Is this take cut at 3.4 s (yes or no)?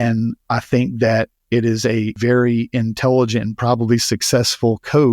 no